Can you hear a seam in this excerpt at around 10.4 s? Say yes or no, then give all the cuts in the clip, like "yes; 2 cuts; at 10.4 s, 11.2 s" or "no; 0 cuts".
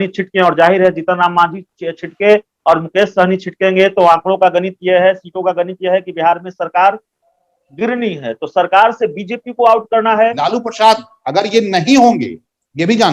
yes; 1 cut; at 10.4 s